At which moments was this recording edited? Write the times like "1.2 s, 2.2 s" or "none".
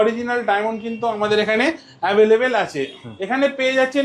none